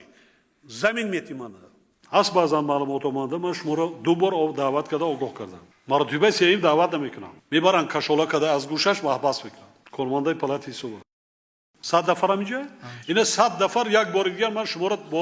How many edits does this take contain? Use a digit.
1